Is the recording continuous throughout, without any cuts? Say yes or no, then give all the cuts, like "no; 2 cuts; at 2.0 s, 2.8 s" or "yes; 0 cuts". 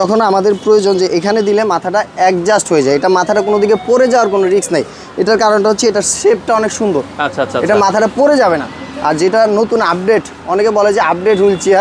yes; 0 cuts